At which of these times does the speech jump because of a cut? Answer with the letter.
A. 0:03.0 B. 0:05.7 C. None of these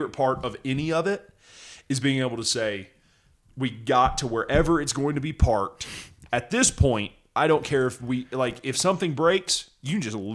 C